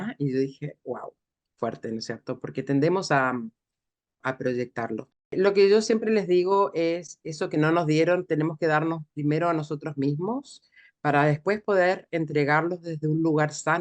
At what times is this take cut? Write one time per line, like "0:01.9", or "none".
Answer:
0:04.2
0:05.3